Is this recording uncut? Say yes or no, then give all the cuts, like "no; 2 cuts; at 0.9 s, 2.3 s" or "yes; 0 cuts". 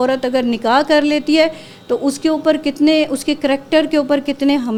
yes; 0 cuts